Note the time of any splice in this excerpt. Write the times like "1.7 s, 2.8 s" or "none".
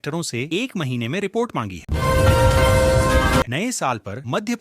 none

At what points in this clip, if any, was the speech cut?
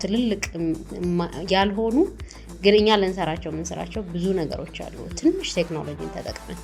none

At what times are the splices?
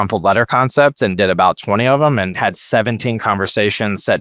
none

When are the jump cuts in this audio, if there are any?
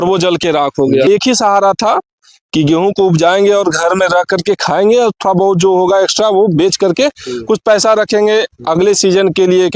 1.1 s

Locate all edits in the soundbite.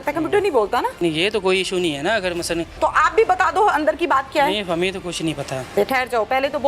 1.0 s, 2.8 s, 5.7 s

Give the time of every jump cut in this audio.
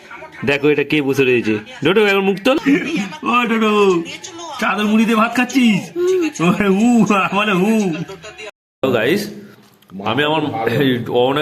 2.6 s, 8.5 s

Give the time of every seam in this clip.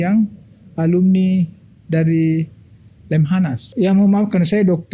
3.6 s

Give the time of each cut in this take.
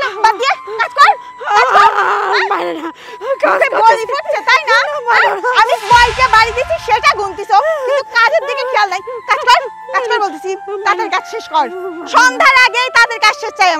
none

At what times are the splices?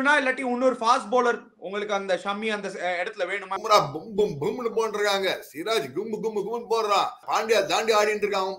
3.6 s, 7.2 s

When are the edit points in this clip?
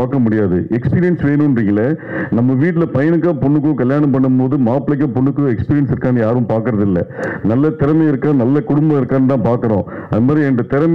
none

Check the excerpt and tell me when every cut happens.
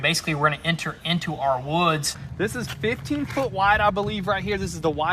2.2 s

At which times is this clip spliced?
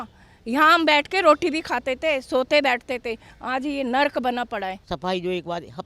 4.8 s

